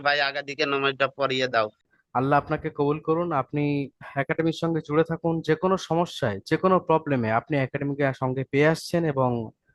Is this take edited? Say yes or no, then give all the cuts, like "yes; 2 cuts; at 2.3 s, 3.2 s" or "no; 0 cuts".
no; 0 cuts